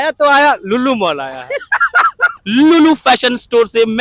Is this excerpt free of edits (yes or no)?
no